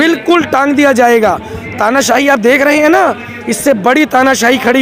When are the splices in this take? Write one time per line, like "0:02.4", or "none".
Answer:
none